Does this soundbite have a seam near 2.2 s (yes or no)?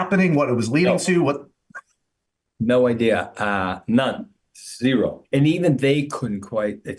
no